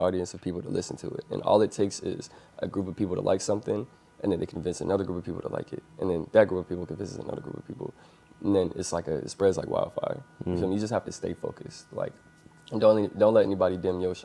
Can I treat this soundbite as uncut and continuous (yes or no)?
yes